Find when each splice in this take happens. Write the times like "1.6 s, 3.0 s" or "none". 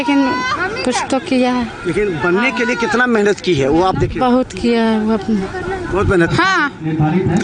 6.3 s